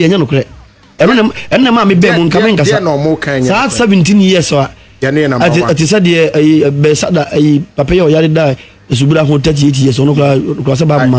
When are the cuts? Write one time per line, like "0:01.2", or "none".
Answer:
none

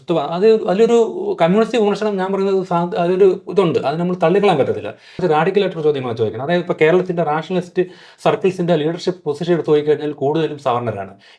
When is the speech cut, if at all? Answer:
0:05.2

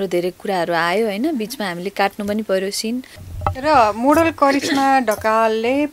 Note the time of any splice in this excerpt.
0:03.2

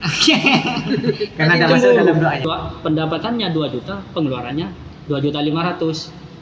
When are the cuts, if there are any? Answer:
0:02.5

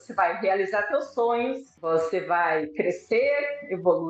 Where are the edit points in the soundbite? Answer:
none

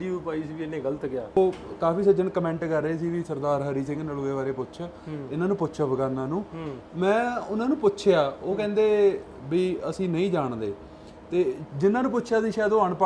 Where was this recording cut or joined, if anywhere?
0:01.4

